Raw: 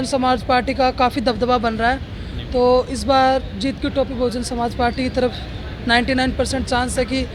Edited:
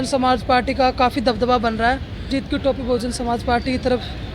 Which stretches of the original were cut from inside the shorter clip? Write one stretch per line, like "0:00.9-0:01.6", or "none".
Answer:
0:02.3-0:03.6